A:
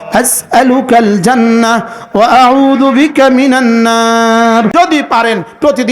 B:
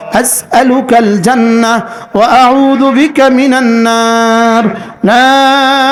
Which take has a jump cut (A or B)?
A